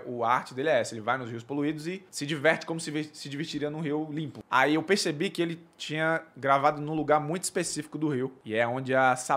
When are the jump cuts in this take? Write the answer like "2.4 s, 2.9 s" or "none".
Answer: 2.1 s, 4.4 s, 8.4 s

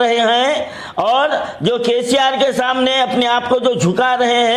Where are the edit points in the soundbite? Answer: none

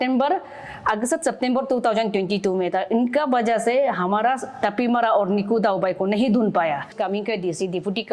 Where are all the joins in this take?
6.9 s

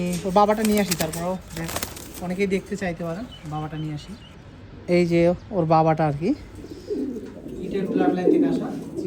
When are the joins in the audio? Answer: 6.8 s

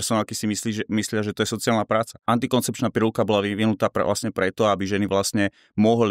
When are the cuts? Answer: 2.2 s

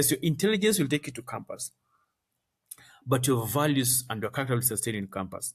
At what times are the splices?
none

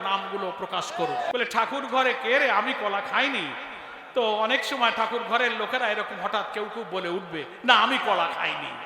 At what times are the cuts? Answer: 1.3 s

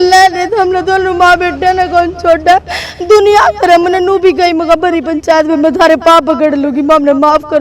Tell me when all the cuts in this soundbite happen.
none

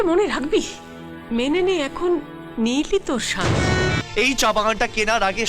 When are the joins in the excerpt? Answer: 4.0 s

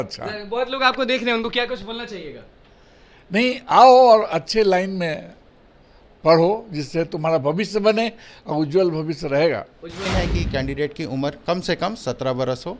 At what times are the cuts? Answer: 10.1 s

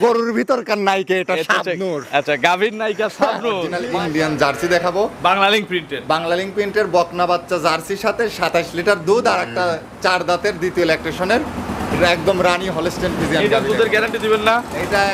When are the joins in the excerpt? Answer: 3.8 s

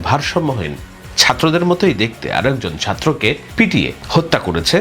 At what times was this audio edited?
3.7 s

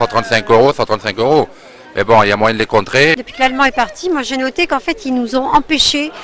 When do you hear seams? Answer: 3.2 s

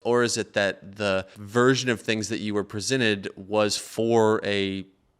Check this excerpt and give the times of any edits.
1.4 s

